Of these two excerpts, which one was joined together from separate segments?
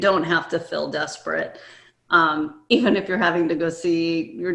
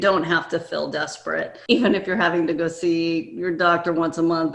second; 1 cut; at 1.6 s

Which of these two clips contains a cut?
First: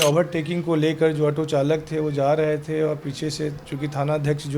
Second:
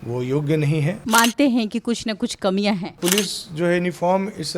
second; 2 cuts; at 1.0 s, 3.0 s

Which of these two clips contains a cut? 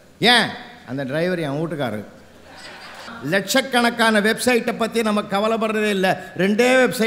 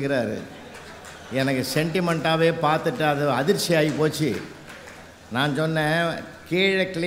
first; 1 cut; at 3.2 s

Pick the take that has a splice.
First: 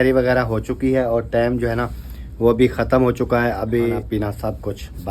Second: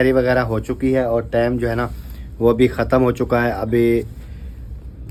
first; 1 cut; at 4.0 s

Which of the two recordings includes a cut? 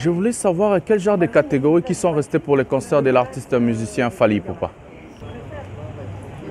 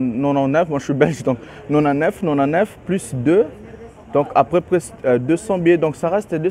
first; 1 cut; at 5.2 s

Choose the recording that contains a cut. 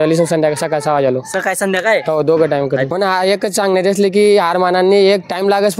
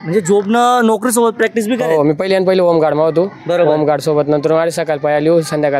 first; 1 cut; at 2.9 s

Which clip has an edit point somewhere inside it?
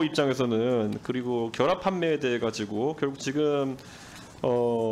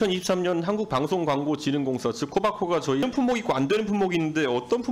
second; 1 cut; at 3.0 s

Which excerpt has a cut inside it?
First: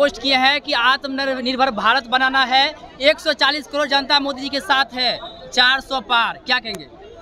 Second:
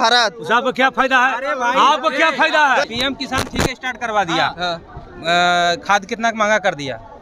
second; 1 cut; at 2.9 s

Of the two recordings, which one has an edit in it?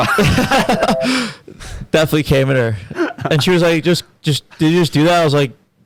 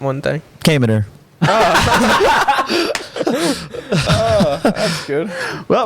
second; 1 cut; at 4.0 s

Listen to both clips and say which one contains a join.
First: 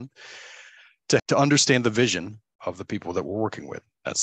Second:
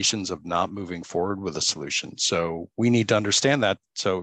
first; 2 cuts; at 1.2 s, 2.6 s

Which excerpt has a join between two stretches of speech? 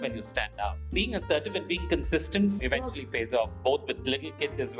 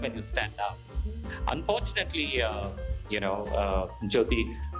first; 2 cuts; at 0.8 s, 2.6 s

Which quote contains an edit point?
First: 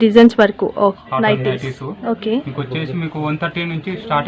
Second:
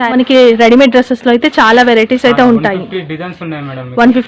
first; 1 cut; at 1.0 s

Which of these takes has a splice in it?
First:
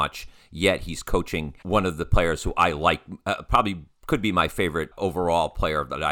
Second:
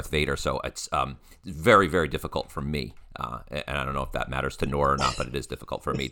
first; 2 cuts; at 1.5 s, 4.9 s

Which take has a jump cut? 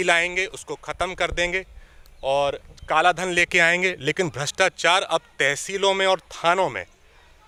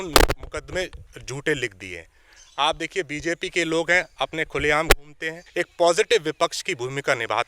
second; 1 cut; at 5.4 s

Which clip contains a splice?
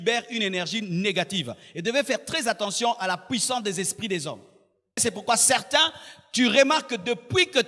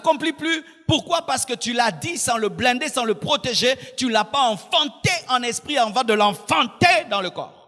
first; 1 cut; at 5.0 s

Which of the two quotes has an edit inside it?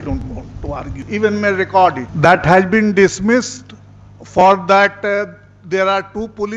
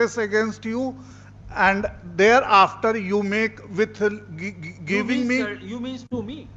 first; 1 cut; at 2.1 s

